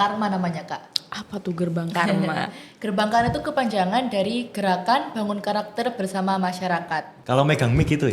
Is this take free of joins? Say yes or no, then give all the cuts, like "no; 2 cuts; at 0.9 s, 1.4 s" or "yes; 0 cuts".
no; 1 cut; at 7.1 s